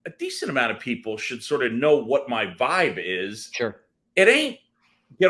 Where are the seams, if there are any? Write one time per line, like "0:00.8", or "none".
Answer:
none